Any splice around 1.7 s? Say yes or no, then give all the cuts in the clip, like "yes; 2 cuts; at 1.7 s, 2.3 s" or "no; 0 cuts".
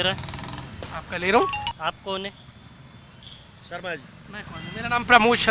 yes; 1 cut; at 1.7 s